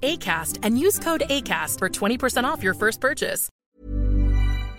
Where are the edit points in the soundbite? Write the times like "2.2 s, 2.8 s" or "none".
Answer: 3.5 s

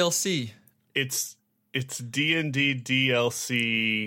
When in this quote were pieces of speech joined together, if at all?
none

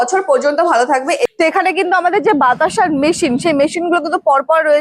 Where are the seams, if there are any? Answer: 1.3 s

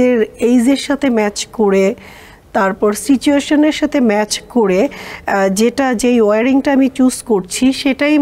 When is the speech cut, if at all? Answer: none

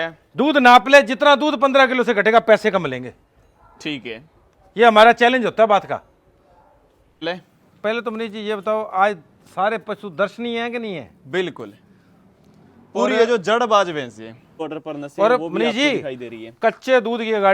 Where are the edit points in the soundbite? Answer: 7.2 s, 14.6 s

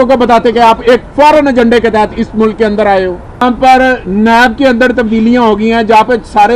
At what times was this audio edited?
3.4 s

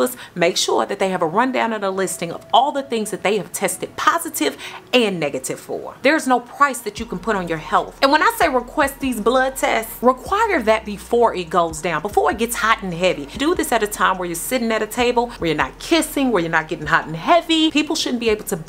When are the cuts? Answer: 5.9 s, 7.9 s, 9.9 s, 15.3 s, 17.7 s

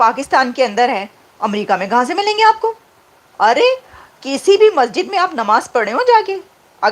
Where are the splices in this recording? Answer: none

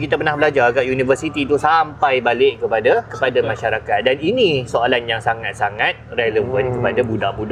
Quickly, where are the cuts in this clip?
none

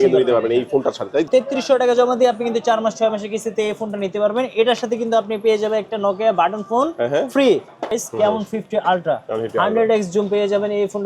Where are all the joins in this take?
1.3 s, 8.0 s

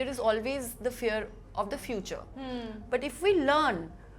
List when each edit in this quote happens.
none

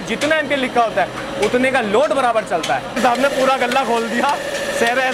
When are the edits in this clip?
3.0 s

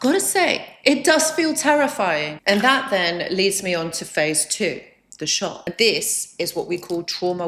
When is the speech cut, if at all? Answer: 2.4 s, 5.6 s

